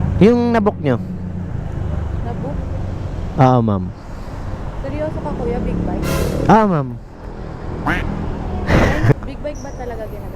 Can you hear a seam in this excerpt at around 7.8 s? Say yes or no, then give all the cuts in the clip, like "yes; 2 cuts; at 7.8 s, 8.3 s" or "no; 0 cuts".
no; 1 cut; at 9.1 s